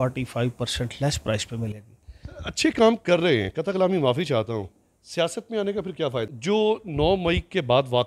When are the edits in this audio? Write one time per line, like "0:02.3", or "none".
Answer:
0:06.3

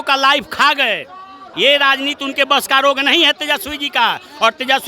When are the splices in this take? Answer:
0:01.4

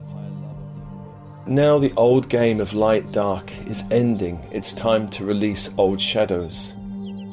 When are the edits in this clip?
0:01.0
0:06.5

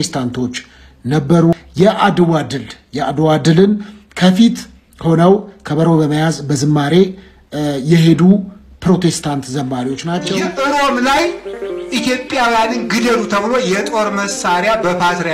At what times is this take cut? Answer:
0:01.7
0:10.3

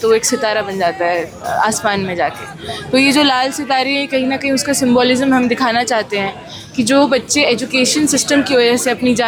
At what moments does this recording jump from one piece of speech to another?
none

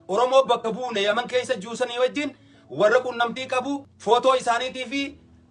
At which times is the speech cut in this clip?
0:03.9

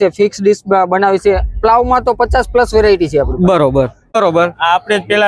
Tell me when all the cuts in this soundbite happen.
0:04.1

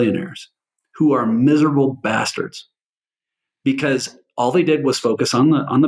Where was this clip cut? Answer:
none

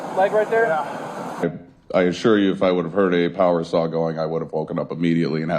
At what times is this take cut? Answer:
0:01.4

